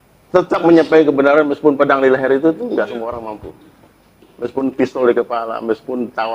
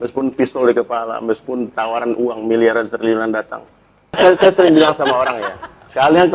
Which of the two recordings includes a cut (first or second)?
second